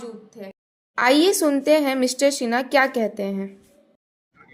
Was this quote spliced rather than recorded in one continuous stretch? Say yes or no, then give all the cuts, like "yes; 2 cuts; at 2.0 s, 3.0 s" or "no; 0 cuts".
no; 0 cuts